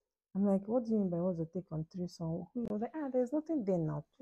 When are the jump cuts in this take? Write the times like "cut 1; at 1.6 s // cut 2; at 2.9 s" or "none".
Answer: cut 1; at 2.7 s